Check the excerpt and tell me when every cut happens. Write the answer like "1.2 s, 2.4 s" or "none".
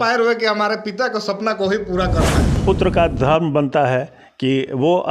2.6 s